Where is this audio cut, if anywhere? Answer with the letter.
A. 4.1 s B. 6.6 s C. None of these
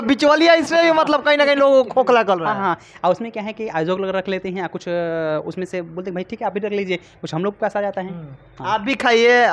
C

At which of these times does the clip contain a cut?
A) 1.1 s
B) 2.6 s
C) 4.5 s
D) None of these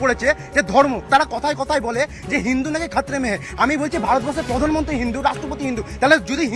A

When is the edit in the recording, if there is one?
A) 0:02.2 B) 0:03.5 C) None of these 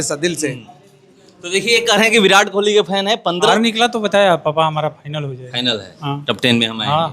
B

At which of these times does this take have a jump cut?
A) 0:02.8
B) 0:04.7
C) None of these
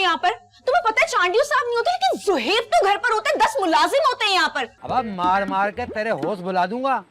B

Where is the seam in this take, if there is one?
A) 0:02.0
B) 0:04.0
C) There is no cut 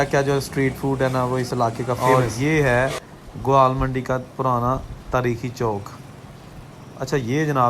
A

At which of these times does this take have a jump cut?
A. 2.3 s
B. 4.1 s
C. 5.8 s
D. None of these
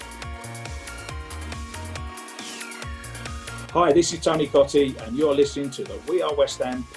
D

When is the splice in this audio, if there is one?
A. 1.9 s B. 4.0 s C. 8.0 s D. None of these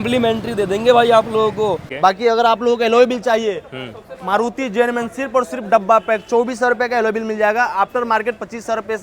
A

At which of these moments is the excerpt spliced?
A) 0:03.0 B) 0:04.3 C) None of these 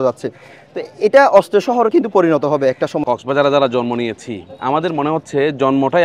A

